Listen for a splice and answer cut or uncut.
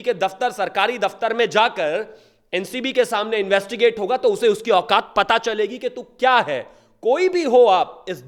uncut